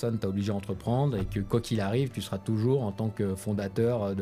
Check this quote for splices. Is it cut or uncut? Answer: uncut